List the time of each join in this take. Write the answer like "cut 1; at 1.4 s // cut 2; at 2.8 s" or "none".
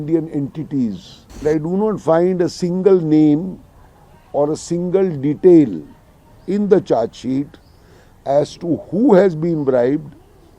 cut 1; at 1.4 s